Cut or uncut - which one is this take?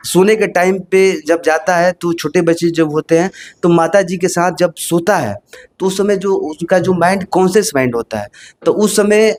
uncut